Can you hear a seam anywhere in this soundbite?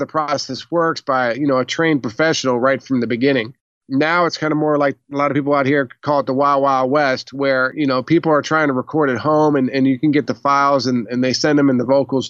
yes; 1 cut; at 7.7 s

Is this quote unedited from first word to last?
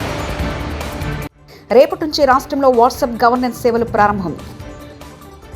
yes; 0 cuts

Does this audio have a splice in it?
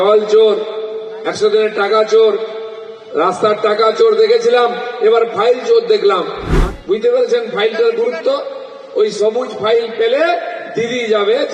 yes; 1 cut; at 6.4 s

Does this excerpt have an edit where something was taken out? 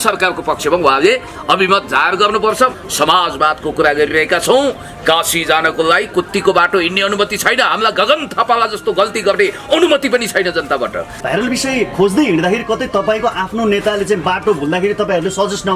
yes; 2 cuts; at 2.8 s, 11.1 s

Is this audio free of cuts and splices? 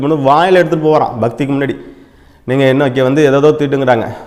yes; 0 cuts

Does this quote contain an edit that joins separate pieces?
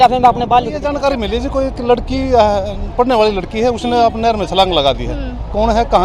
yes; 1 cut; at 1.0 s

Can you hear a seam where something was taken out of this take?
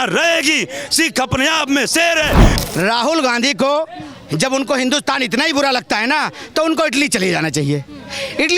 yes; 1 cut; at 2.5 s

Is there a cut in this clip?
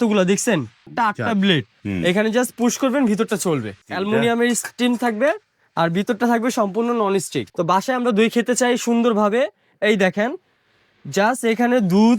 yes; 4 cuts; at 0.9 s, 1.8 s, 3.9 s, 7.4 s

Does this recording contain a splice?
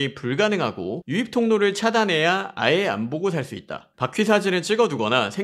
no; 0 cuts

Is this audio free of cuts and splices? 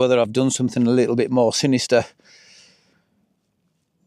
yes; 0 cuts

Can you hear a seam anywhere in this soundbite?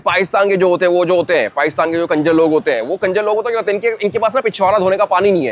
no; 0 cuts

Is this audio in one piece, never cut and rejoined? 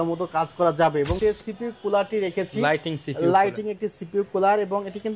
no; 1 cut; at 1.2 s

